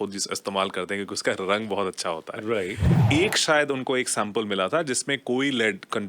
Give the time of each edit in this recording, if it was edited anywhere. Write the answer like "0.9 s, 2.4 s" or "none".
3.0 s